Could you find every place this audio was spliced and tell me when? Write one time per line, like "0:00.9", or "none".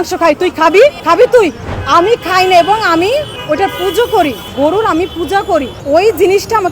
0:01.0
0:01.7
0:03.3
0:04.4
0:05.8